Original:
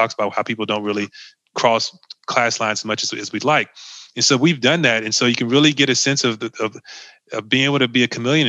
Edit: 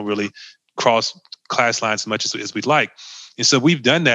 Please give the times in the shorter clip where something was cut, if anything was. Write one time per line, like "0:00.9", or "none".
none